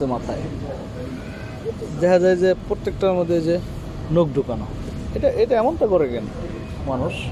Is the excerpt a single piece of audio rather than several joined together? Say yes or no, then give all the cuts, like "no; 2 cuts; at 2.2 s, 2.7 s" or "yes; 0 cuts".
yes; 0 cuts